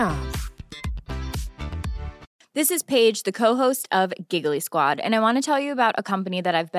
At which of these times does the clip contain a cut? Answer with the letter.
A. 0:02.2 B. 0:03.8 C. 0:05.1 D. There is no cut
A